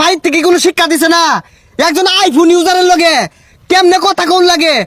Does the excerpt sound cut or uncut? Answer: uncut